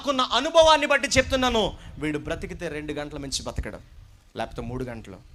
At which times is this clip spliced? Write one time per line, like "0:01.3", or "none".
none